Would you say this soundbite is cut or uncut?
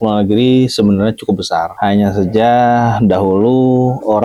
uncut